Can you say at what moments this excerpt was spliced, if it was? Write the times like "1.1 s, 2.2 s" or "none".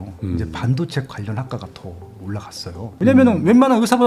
3.0 s